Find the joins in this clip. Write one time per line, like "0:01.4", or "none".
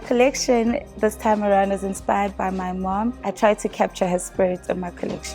0:03.2